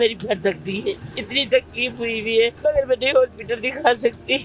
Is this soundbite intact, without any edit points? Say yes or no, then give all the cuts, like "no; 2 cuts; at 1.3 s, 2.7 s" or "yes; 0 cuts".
no; 1 cut; at 2.6 s